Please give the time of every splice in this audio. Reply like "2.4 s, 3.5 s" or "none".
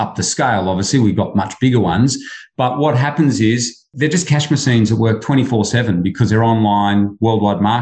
none